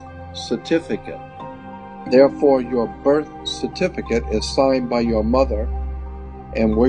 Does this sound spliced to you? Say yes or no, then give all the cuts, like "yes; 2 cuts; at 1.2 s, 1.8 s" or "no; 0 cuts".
yes; 1 cut; at 1.6 s